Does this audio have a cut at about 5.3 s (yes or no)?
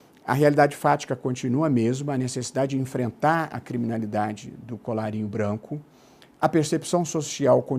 yes